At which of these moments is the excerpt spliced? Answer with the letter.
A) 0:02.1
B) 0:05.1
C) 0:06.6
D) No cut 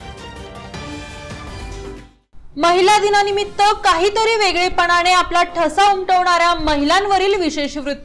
A